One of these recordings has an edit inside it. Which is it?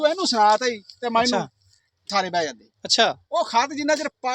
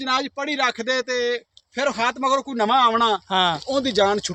first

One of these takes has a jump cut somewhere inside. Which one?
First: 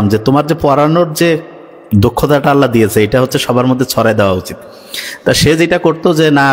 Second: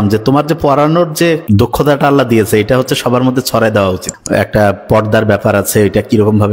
second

